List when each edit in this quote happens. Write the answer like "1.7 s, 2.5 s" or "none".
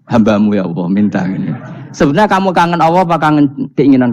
none

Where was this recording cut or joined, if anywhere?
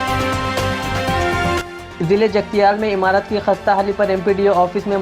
1.6 s

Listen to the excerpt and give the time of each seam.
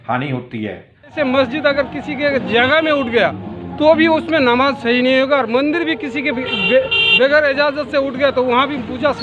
1.1 s

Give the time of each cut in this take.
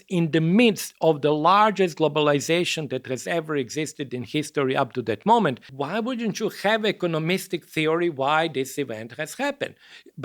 5.7 s

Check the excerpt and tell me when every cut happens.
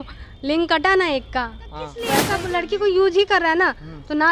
2.2 s

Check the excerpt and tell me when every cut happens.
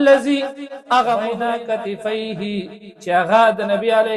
1.3 s

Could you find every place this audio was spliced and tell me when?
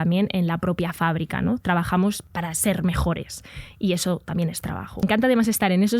2.2 s, 5.0 s

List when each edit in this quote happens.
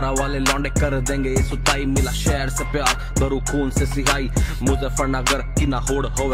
none

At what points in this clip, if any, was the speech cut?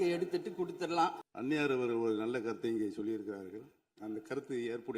1.3 s

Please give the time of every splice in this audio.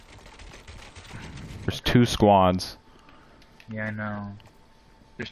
1.7 s

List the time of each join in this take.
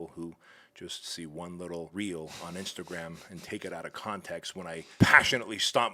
1.9 s, 4.9 s

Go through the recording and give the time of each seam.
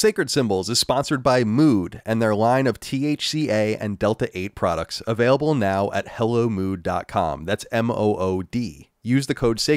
none

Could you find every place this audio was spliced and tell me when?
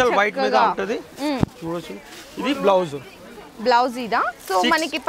none

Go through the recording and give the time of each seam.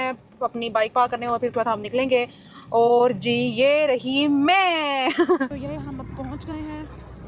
5.5 s

